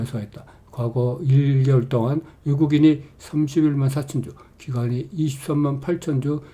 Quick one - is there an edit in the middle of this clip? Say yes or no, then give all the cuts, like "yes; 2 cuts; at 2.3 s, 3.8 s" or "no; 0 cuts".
no; 0 cuts